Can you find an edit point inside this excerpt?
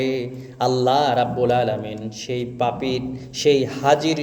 no; 0 cuts

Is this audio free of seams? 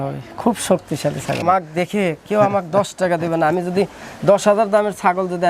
no; 1 cut; at 1.4 s

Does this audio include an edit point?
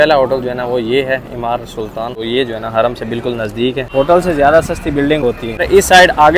yes; 3 cuts; at 2.2 s, 3.8 s, 5.5 s

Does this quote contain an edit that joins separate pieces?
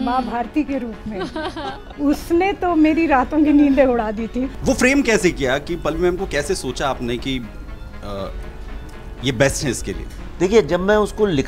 yes; 1 cut; at 4.5 s

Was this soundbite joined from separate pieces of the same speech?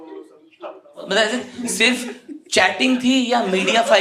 yes; 1 cut; at 1.0 s

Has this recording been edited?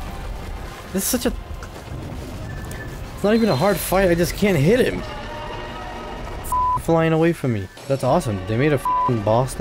yes; 1 cut; at 7.7 s

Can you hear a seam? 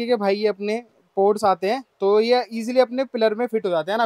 no; 0 cuts

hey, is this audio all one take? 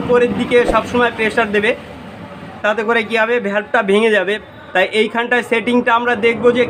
no; 1 cut; at 4.4 s

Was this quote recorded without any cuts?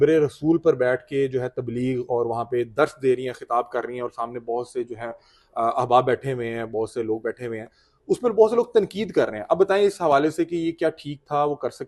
yes; 0 cuts

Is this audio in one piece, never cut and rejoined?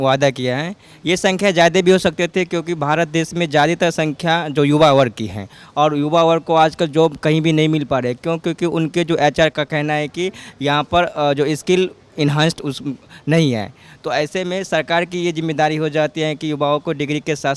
yes; 0 cuts

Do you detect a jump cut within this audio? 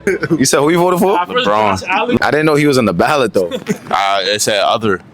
yes; 1 cut; at 2.2 s

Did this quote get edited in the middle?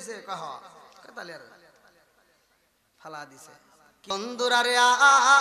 yes; 1 cut; at 4.1 s

